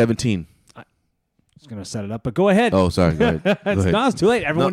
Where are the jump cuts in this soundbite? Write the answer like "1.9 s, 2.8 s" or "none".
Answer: none